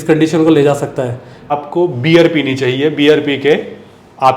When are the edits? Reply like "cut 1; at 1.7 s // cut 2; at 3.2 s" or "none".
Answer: cut 1; at 1.5 s